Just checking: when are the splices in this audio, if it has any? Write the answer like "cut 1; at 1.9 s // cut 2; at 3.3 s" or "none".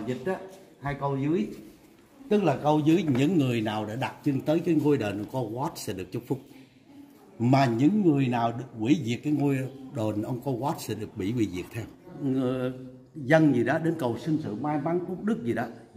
cut 1; at 12.1 s